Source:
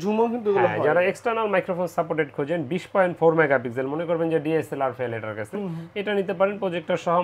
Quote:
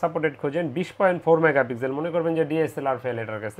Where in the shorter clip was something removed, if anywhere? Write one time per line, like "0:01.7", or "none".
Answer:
none